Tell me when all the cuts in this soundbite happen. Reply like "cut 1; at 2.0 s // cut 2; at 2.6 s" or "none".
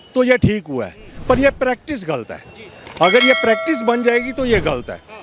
none